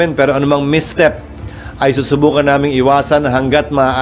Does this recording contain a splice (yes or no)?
no